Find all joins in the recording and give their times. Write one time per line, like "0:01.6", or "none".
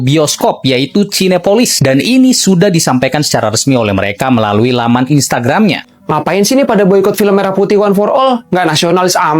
0:05.8